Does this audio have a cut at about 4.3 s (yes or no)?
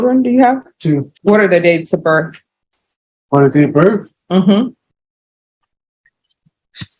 no